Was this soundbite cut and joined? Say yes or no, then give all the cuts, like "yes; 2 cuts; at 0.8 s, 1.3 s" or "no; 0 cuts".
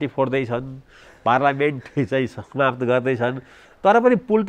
yes; 1 cut; at 3.3 s